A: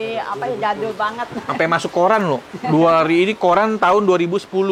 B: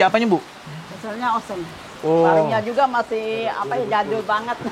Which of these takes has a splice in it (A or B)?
B